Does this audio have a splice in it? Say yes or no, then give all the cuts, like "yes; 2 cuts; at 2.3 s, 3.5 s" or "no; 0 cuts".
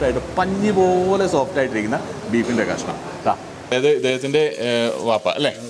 yes; 1 cut; at 3.7 s